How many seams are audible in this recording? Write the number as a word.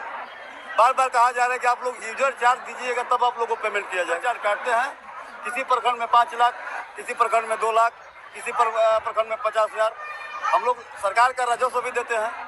one